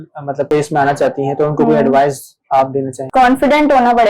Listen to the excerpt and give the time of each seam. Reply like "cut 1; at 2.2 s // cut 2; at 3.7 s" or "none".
cut 1; at 3.0 s